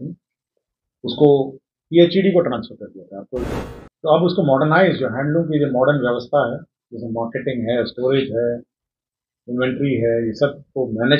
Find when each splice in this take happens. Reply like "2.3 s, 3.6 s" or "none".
3.5 s